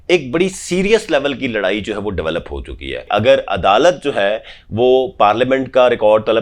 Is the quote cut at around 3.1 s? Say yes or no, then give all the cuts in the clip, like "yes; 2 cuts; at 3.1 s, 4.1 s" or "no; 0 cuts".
yes; 1 cut; at 3.1 s